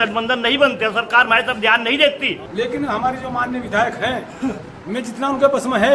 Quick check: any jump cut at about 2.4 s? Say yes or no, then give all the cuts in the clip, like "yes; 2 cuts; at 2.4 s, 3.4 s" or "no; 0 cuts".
yes; 1 cut; at 2.4 s